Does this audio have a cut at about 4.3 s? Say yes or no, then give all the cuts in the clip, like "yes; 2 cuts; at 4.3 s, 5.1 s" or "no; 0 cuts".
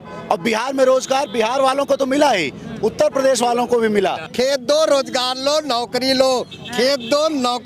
yes; 1 cut; at 4.3 s